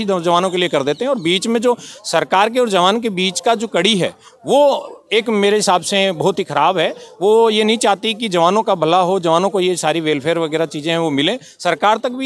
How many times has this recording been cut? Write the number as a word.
zero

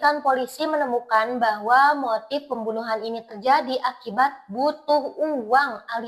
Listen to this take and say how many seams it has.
zero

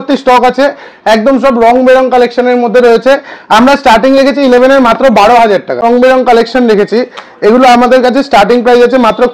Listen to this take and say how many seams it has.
one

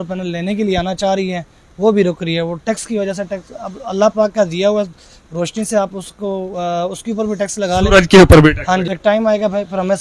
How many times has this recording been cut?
one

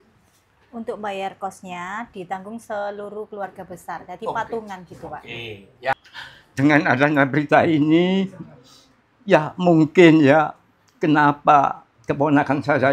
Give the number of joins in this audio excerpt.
one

